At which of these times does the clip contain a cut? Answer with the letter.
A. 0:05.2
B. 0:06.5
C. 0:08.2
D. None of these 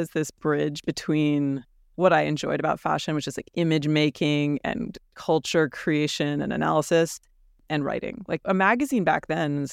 D